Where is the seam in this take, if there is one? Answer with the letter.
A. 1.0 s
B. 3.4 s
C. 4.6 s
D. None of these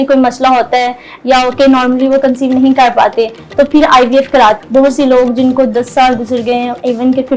C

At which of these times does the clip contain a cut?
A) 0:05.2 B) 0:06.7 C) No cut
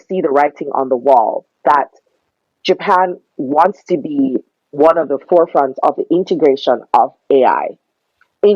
C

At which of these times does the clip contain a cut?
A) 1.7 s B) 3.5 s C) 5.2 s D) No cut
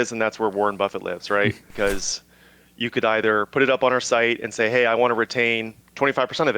A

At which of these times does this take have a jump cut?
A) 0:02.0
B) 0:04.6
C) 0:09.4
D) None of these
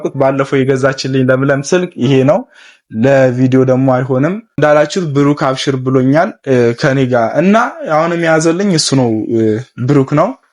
B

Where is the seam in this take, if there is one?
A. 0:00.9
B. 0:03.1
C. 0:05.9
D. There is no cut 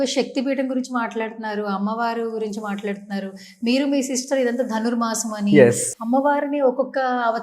C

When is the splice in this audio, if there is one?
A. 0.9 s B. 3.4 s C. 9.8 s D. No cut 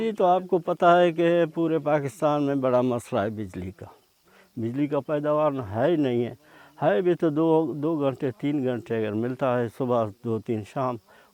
D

